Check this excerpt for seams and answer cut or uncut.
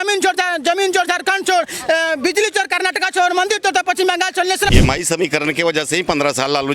cut